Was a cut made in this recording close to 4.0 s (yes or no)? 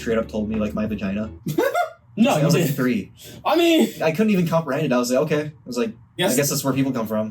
yes